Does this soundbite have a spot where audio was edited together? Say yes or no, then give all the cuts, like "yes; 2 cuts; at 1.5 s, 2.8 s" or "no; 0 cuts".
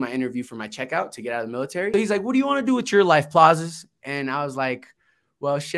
yes; 1 cut; at 1.9 s